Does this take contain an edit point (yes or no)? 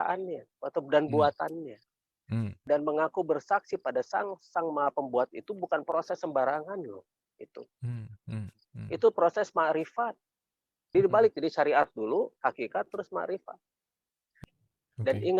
yes